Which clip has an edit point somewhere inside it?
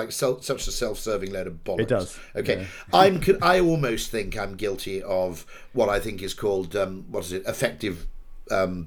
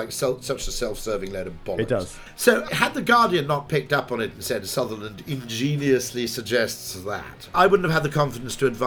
second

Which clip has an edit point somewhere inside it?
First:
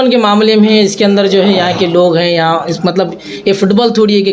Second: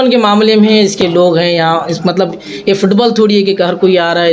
second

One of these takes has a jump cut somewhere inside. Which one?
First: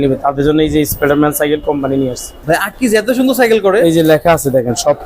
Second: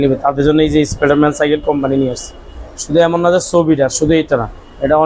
first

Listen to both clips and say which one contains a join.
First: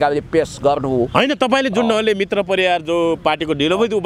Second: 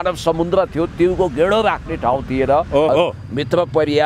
second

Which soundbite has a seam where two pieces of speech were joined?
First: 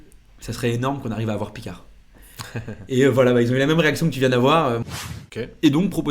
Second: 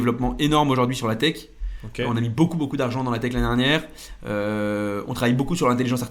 first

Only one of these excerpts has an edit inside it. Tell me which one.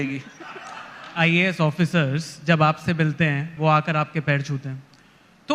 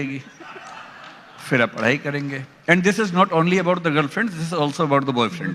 first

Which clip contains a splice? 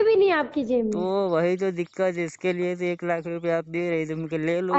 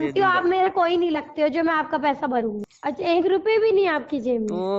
second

